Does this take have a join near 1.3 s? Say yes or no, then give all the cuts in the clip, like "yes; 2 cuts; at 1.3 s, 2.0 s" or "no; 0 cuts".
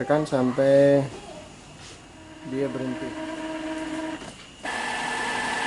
no; 1 cut; at 3.0 s